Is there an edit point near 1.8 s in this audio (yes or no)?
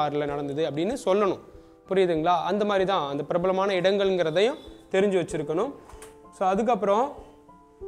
no